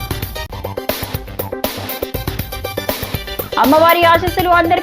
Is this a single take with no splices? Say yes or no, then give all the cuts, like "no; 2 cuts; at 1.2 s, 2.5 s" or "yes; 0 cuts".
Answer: yes; 0 cuts